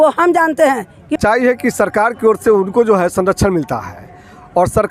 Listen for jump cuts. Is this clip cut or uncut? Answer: cut